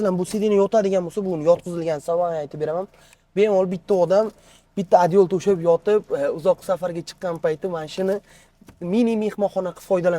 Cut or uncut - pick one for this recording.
uncut